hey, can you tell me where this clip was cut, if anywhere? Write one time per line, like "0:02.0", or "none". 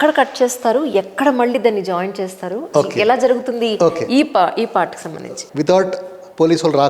0:05.1